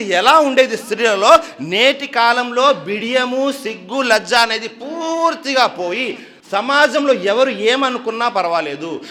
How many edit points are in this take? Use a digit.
0